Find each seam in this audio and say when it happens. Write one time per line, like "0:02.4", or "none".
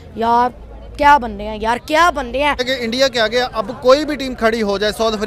0:02.6